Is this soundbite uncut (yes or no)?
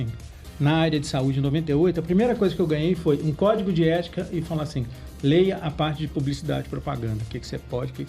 yes